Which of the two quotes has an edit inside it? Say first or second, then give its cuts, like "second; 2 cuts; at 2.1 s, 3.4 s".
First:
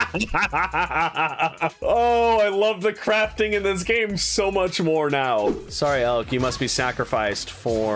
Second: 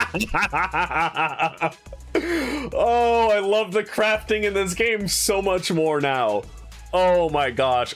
first; 2 cuts; at 1.8 s, 5.6 s